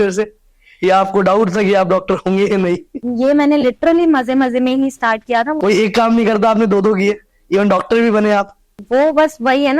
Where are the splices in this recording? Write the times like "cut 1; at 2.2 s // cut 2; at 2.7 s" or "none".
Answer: cut 1; at 3.0 s // cut 2; at 5.6 s